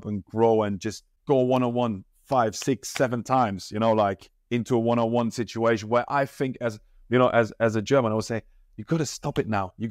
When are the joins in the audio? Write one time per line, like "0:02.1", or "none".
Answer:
0:01.1

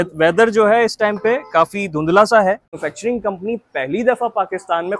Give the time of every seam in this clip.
0:02.8

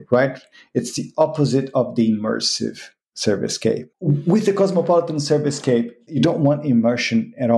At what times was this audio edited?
0:03.9
0:06.0

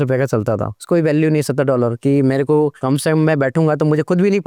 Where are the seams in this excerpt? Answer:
none

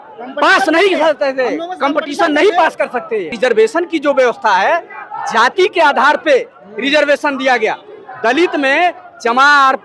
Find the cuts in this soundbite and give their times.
0:03.3

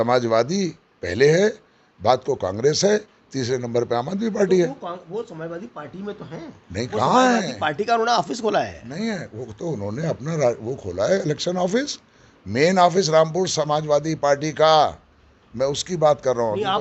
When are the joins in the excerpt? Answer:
none

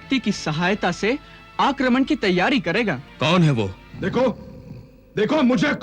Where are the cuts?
0:03.1
0:03.8

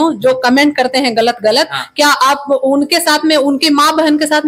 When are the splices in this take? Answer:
none

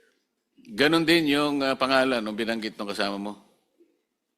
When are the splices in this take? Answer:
none

